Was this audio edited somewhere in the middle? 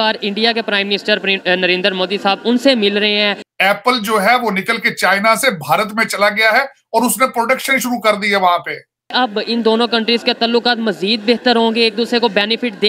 yes; 2 cuts; at 3.4 s, 9.1 s

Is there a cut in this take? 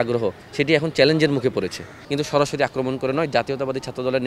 yes; 1 cut; at 1.9 s

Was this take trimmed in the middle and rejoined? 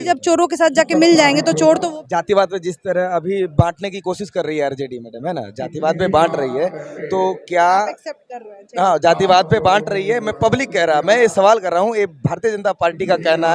yes; 1 cut; at 1.9 s

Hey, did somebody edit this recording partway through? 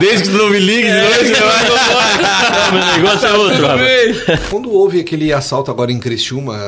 yes; 1 cut; at 4.5 s

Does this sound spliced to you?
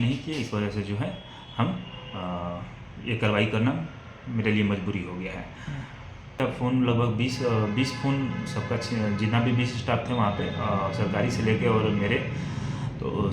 yes; 1 cut; at 6.4 s

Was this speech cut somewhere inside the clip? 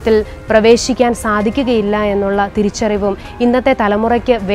no; 0 cuts

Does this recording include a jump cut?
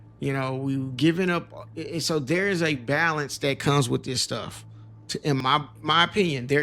yes; 1 cut; at 5.4 s

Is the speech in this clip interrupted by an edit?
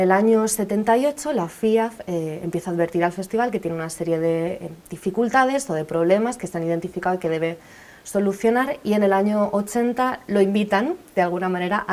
no; 0 cuts

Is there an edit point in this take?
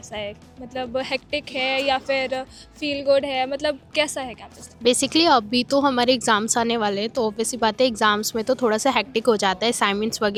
no; 0 cuts

